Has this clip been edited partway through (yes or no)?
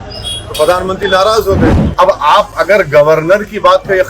yes